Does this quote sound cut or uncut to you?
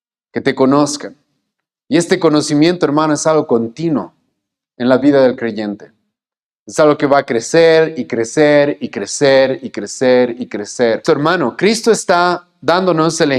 cut